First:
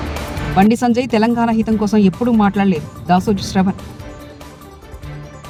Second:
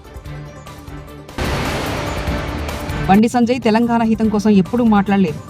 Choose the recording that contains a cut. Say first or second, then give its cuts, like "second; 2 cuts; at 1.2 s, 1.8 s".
second; 1 cut; at 1.3 s